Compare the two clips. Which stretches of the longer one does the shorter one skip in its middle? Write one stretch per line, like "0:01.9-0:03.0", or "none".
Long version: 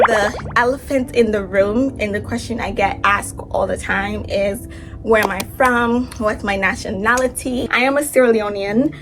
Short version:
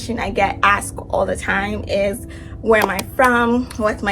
none